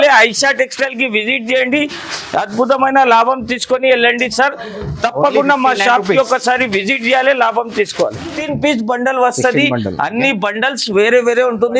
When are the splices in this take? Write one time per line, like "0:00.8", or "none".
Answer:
0:08.3